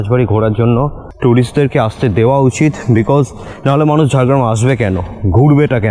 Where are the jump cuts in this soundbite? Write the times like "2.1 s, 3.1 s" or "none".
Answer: 1.0 s